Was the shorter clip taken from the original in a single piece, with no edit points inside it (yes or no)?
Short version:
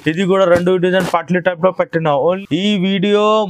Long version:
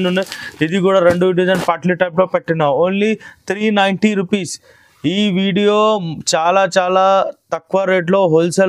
no